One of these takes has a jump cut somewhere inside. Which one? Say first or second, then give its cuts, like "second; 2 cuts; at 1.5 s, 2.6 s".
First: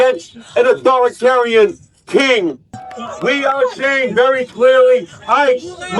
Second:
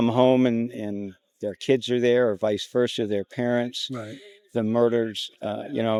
first; 1 cut; at 2.8 s